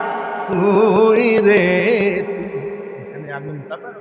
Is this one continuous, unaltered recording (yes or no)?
yes